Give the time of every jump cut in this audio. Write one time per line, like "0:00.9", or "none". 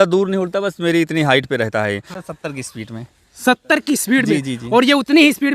0:02.1